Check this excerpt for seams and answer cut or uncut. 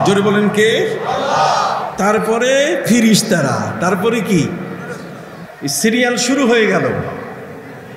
uncut